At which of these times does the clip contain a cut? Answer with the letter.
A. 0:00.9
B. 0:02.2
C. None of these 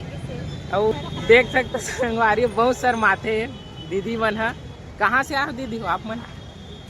A